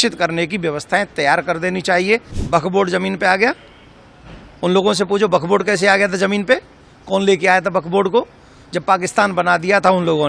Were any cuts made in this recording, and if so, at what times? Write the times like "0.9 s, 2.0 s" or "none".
2.3 s